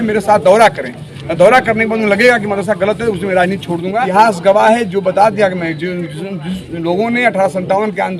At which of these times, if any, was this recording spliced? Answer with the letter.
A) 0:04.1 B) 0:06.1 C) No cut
A